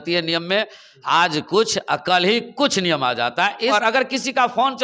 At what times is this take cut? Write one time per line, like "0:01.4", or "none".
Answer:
0:03.7